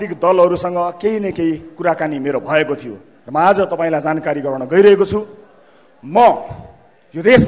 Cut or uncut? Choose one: uncut